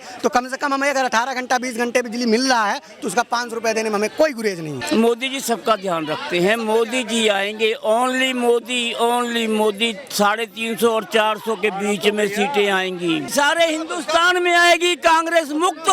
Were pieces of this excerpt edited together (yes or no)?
yes